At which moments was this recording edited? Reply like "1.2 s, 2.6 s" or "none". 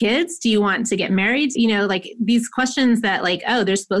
1.5 s